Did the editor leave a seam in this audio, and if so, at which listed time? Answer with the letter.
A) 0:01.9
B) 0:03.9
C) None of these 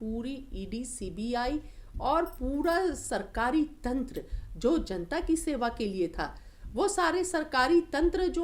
C